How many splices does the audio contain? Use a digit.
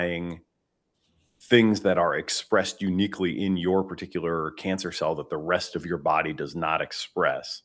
0